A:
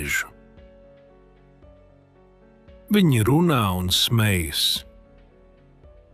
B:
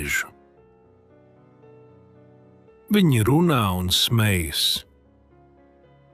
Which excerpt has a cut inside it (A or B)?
B